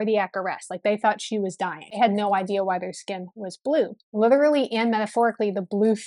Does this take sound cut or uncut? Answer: cut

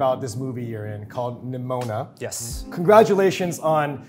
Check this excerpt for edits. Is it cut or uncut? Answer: uncut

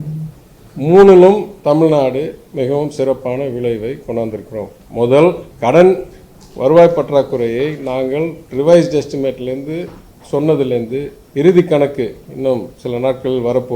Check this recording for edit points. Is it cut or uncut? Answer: cut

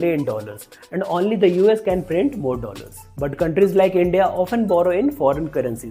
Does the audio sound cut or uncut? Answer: uncut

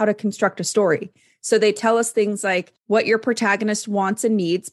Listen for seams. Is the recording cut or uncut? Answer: cut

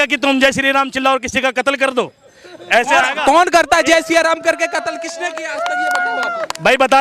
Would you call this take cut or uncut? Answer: uncut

